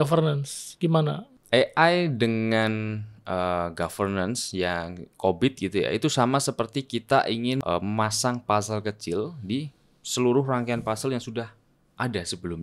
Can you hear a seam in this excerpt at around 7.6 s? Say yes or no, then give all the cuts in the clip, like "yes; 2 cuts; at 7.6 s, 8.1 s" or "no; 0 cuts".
yes; 2 cuts; at 1.2 s, 7.6 s